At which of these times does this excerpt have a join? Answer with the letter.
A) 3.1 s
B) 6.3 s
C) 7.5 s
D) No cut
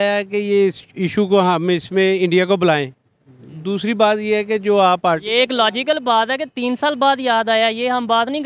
D